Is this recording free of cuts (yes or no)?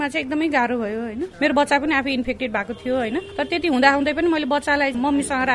yes